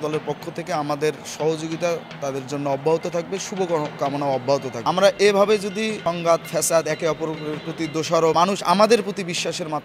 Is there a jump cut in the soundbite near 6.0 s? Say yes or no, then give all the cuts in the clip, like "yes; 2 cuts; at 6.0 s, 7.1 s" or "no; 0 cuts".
yes; 3 cuts; at 4.7 s, 6.0 s, 8.3 s